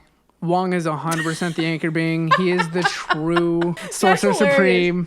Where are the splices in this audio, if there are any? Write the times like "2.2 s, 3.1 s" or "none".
3.8 s

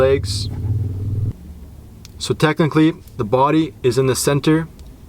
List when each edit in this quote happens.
1.3 s

